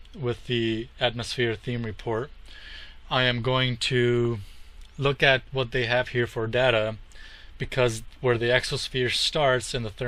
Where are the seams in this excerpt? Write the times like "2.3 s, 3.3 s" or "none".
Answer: none